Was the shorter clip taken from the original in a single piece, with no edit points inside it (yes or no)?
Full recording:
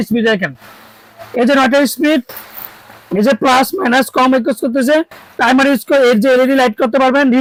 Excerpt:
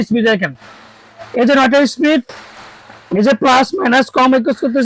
yes